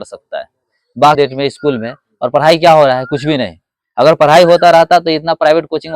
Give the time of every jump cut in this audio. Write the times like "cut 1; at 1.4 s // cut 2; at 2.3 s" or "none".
cut 1; at 1.2 s